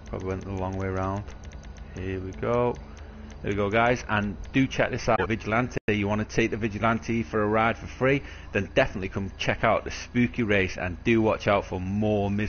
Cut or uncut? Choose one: uncut